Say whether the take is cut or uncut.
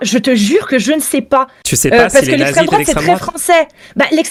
uncut